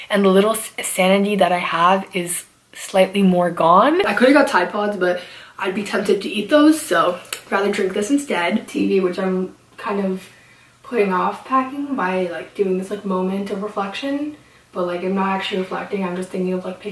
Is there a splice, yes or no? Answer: yes